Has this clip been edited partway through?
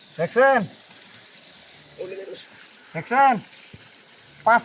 no; 0 cuts

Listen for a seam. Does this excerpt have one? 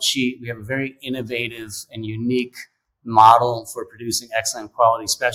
no; 0 cuts

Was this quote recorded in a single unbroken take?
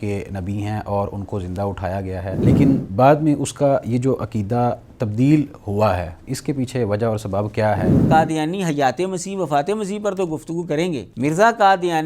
no; 3 cuts; at 2.5 s, 8.0 s, 11.1 s

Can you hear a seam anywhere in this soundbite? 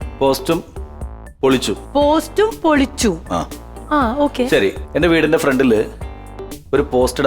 no; 0 cuts

